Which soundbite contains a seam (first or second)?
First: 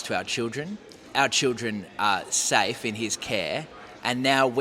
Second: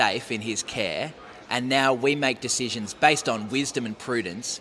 first